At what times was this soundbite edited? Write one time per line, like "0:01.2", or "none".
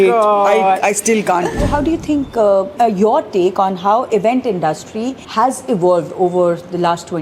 0:01.7
0:02.7
0:05.2